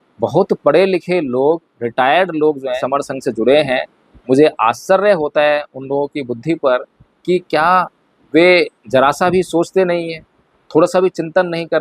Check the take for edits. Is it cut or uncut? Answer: cut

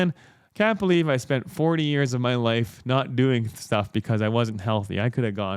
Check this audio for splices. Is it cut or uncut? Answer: uncut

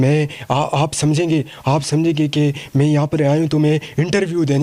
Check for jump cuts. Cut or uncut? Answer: uncut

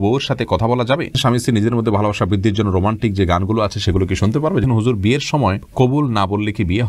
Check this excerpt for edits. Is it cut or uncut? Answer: cut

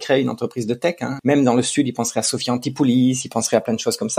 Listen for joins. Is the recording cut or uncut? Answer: cut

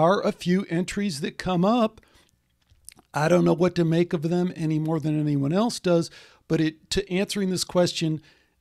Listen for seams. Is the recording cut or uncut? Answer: uncut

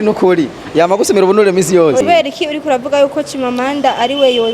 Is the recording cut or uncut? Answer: cut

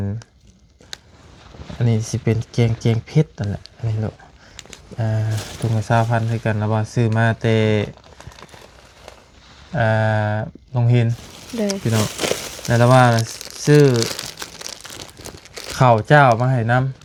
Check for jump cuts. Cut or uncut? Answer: uncut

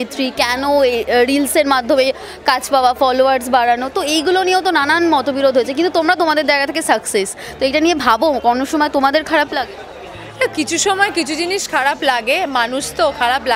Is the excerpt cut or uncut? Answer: uncut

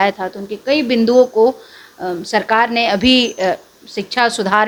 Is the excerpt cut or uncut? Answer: uncut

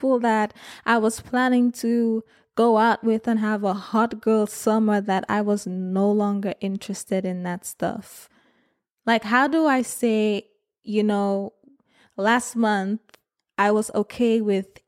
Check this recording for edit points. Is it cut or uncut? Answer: uncut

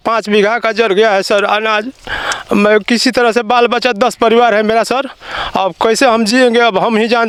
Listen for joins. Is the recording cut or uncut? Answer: uncut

